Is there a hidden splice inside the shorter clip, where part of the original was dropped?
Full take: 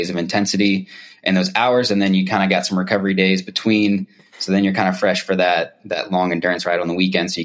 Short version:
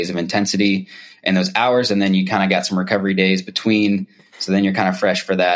no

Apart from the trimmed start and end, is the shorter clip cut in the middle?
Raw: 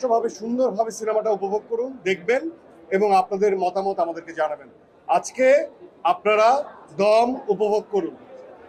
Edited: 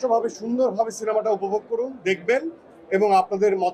no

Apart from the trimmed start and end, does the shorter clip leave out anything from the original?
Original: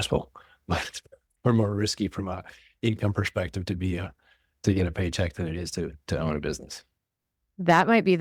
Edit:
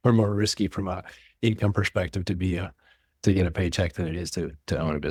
no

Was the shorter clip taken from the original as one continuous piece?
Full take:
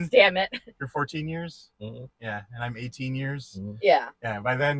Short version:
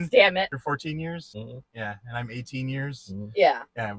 no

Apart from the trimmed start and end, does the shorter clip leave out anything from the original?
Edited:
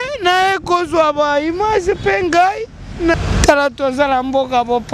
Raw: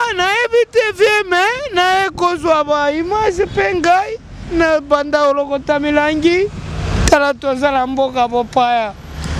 yes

